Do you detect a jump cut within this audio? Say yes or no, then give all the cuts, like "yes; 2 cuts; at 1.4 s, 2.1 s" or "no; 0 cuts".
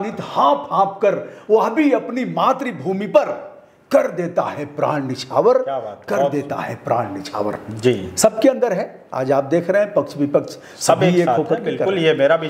no; 0 cuts